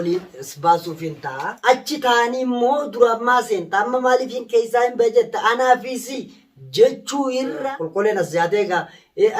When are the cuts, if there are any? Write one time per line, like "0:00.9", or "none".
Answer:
0:01.6
0:07.6